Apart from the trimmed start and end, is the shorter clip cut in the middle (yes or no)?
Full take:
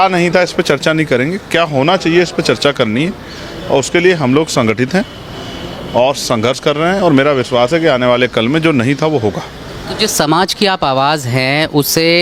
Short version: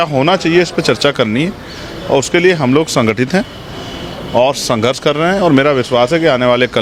no